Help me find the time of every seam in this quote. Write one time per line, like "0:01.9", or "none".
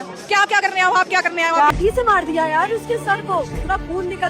0:01.7